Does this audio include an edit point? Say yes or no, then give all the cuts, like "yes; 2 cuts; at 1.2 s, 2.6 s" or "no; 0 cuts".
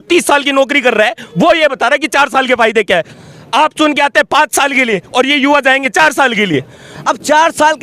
yes; 2 cuts; at 3.1 s, 6.9 s